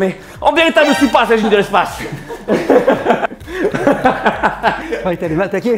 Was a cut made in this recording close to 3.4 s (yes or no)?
yes